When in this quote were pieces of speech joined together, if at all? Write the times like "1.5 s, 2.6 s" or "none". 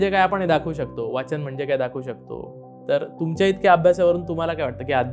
2.6 s